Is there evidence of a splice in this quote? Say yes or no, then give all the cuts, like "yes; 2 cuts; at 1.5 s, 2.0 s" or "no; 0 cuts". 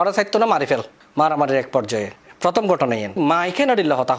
yes; 2 cuts; at 1.0 s, 3.2 s